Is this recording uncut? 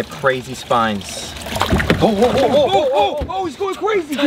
yes; 0 cuts

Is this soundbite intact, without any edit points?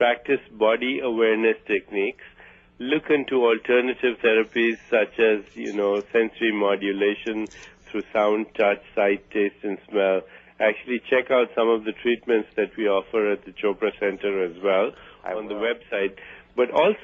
no; 1 cut; at 7.6 s

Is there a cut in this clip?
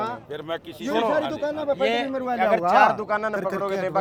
no; 0 cuts

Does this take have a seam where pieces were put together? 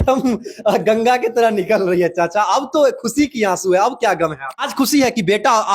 yes; 1 cut; at 4.6 s

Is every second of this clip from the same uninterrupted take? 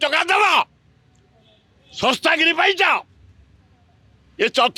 yes; 0 cuts

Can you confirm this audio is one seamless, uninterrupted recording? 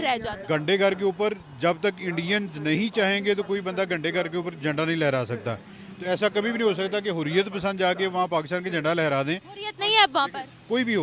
yes; 0 cuts

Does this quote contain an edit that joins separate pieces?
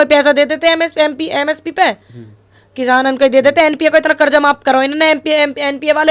no; 0 cuts

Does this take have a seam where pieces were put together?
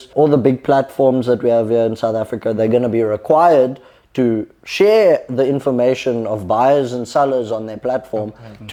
no; 0 cuts

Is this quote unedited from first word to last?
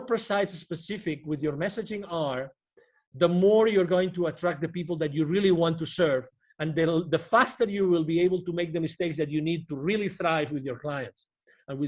yes; 0 cuts

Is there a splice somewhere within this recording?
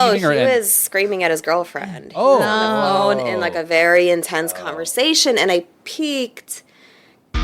no; 0 cuts

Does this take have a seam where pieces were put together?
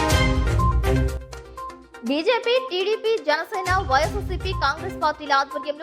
yes; 1 cut; at 1.3 s

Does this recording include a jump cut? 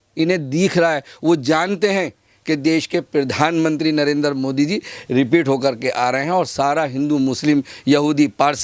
no; 0 cuts

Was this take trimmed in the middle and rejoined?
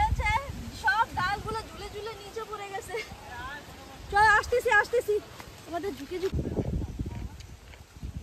no; 0 cuts

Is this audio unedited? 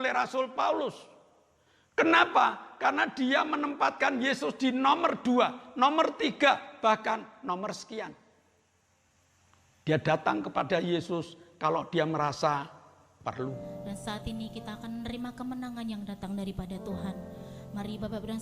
no; 1 cut; at 13.6 s

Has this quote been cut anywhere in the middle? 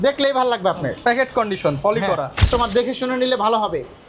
yes; 1 cut; at 2.5 s

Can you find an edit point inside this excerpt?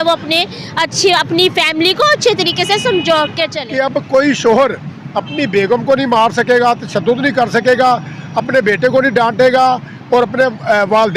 yes; 1 cut; at 4.1 s

